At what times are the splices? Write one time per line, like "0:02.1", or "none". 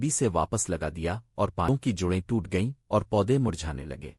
0:01.7